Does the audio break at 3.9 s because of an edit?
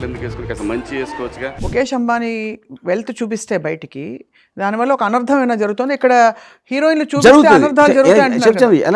no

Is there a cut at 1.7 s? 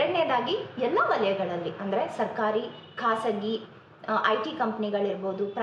no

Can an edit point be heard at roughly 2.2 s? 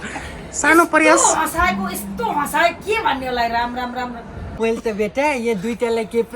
no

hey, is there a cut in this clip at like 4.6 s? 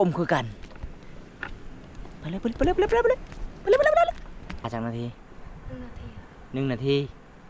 yes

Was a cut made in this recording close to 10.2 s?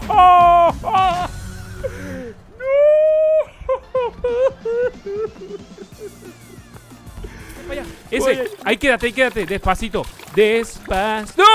no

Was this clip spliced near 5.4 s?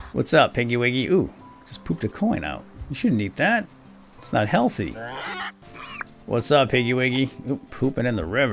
yes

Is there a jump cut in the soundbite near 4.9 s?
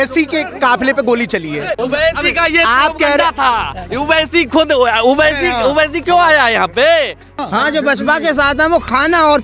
no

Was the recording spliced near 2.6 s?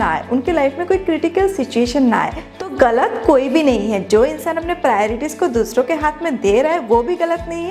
yes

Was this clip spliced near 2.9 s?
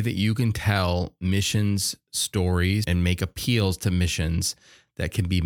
yes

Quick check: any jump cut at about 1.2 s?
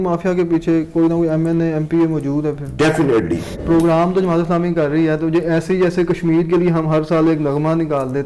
no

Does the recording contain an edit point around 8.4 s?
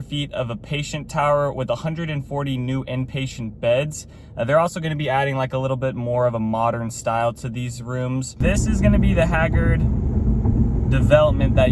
yes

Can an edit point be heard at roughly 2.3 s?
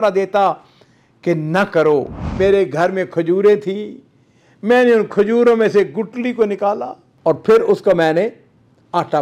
yes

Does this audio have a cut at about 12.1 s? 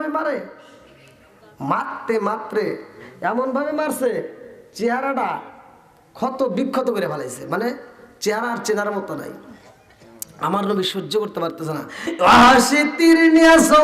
yes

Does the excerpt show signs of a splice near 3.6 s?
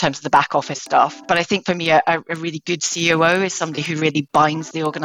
no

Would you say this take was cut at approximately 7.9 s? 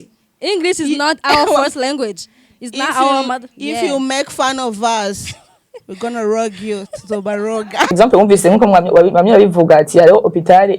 yes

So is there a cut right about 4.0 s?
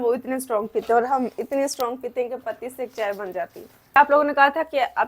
yes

